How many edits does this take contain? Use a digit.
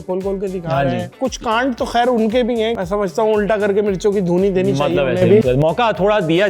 3